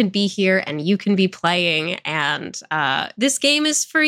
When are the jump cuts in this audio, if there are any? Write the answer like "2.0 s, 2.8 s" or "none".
none